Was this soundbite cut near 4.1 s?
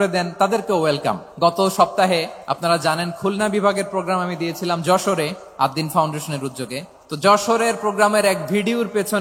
no; 4 cuts; at 1.3 s, 2.4 s, 5.4 s, 7.0 s

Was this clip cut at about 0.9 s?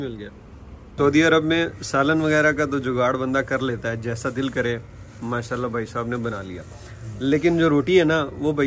yes; 1 cut; at 0.9 s

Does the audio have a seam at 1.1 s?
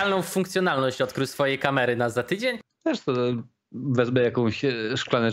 no; 1 cut; at 2.7 s

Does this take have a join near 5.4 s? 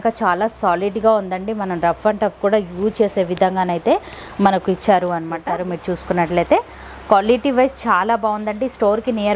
yes; 1 cut; at 5.4 s

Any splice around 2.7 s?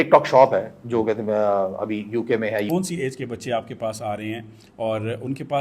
yes; 1 cut; at 2.7 s

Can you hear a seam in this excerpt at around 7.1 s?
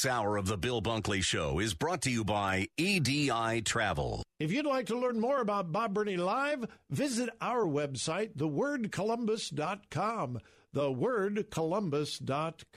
no; 1 cut; at 4.3 s

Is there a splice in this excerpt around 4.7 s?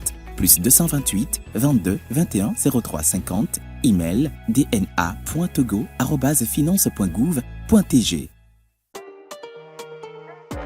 no; 1 cut; at 8.8 s

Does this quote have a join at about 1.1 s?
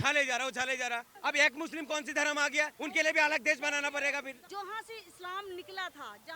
yes; 3 cuts; at 1.1 s, 2.7 s, 4.4 s

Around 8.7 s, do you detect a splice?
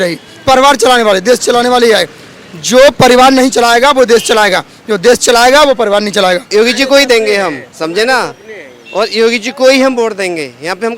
no; 1 cut; at 6.4 s

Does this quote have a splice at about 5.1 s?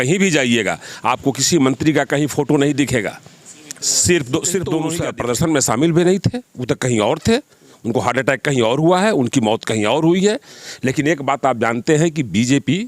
yes; 1 cut; at 5.1 s

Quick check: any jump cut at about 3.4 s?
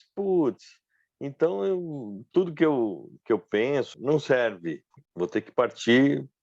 no; 1 cut; at 5.1 s

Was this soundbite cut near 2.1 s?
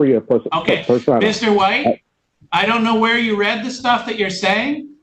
no; 0 cuts

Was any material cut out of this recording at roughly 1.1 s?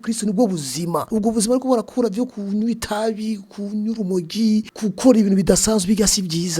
yes; 2 cuts; at 1.1 s, 4.7 s

